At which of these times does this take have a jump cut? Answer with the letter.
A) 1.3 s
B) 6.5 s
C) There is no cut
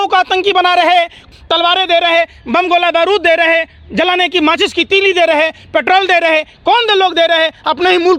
A